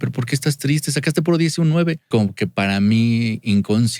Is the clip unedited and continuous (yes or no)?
no